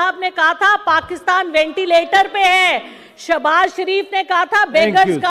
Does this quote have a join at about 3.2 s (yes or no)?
no